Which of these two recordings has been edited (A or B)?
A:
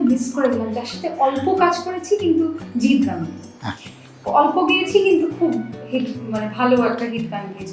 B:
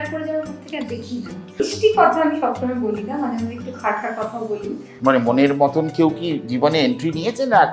B